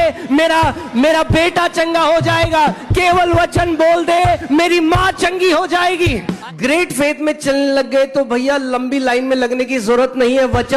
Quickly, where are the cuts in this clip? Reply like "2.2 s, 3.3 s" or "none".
6.4 s